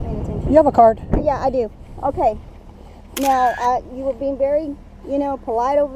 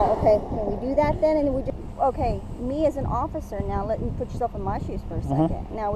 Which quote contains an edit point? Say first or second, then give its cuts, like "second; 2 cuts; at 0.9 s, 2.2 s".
second; 1 cut; at 1.8 s